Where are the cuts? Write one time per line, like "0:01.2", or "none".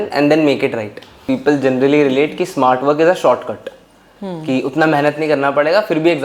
0:01.2